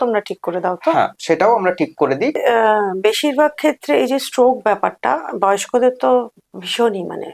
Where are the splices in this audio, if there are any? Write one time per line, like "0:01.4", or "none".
0:02.4